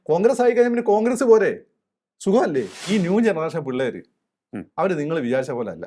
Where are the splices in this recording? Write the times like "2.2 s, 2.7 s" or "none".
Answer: 2.9 s